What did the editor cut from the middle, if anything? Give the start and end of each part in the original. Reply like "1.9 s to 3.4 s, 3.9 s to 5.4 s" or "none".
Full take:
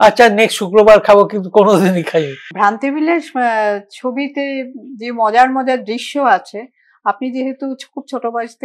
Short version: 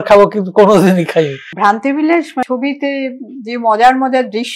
3.4 s to 4.0 s